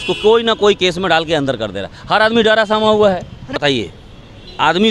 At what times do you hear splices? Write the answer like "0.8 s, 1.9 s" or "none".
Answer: 3.5 s